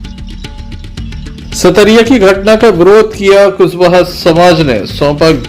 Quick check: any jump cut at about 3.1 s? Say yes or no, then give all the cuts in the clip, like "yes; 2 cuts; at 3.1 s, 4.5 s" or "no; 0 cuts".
no; 1 cut; at 0.9 s